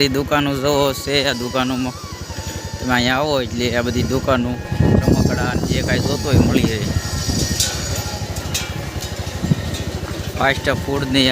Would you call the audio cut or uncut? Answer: cut